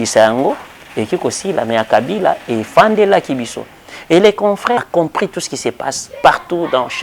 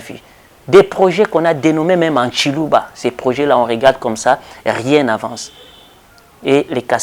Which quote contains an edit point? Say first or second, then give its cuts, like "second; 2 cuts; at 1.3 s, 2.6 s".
first; 1 cut; at 4.8 s